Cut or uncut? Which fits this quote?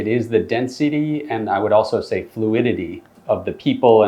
cut